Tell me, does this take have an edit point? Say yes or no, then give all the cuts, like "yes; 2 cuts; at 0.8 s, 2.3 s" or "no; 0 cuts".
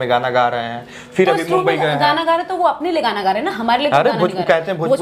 no; 0 cuts